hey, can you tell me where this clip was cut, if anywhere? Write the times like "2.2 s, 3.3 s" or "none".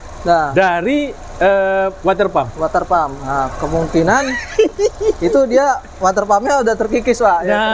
none